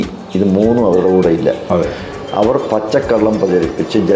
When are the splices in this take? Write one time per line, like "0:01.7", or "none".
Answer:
none